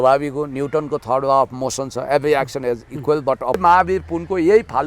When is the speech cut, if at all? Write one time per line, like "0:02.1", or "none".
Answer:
0:03.6